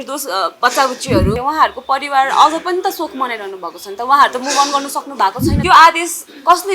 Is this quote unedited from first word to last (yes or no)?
no